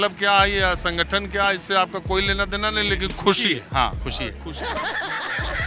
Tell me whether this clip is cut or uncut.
uncut